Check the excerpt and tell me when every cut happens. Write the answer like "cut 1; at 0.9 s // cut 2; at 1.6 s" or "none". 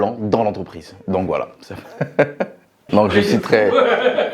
cut 1; at 2.7 s